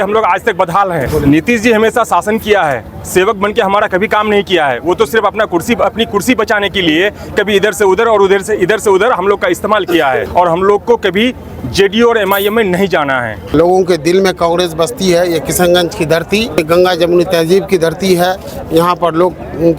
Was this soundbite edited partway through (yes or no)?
yes